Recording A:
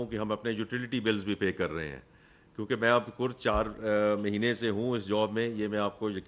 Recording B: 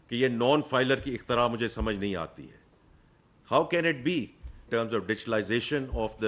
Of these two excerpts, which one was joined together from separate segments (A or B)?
B